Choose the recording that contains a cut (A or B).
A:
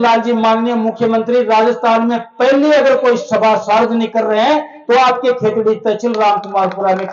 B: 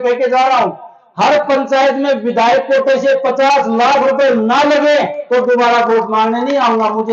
B